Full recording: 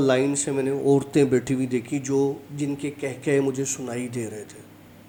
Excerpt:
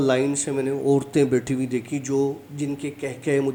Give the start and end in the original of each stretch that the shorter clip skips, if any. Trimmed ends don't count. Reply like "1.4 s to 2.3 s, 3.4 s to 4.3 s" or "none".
none